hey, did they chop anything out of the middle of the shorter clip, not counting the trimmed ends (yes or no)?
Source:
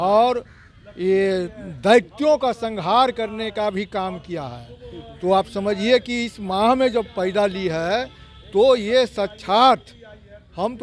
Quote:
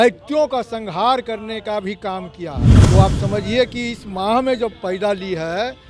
yes